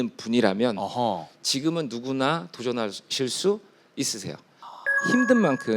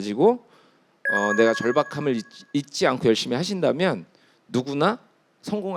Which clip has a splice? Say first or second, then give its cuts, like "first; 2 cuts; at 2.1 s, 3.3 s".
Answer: first; 1 cut; at 4.7 s